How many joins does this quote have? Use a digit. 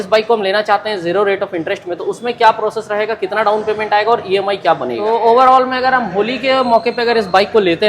1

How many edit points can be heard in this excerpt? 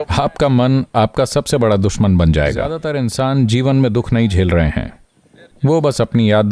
1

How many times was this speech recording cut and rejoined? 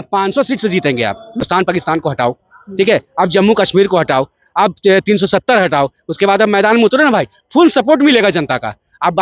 1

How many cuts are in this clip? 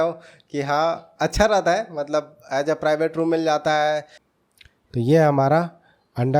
1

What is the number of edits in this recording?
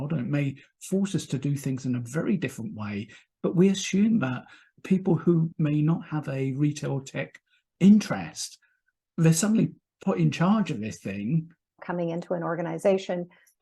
2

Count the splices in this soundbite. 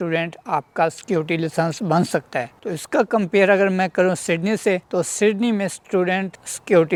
0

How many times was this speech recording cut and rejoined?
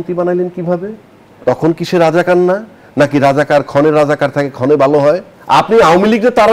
1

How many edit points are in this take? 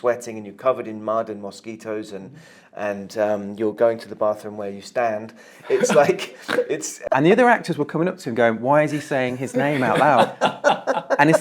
1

